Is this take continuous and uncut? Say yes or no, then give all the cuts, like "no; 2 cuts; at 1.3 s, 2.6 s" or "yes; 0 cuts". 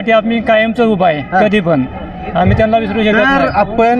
yes; 0 cuts